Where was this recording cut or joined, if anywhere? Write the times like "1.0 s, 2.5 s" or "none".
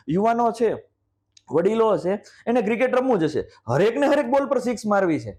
none